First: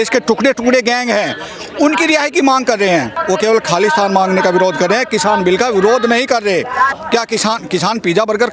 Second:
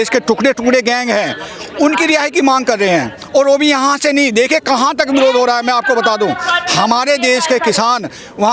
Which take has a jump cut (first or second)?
first